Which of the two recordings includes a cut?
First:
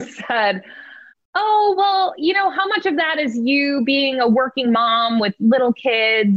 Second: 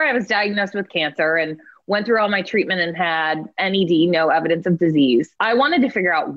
second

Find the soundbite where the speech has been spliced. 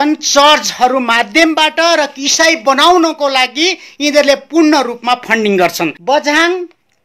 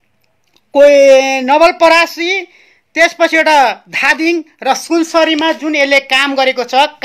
first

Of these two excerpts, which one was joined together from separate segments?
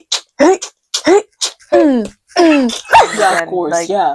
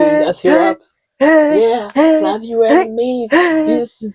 first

